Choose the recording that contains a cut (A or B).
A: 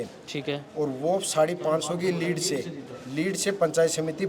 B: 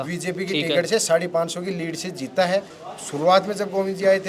B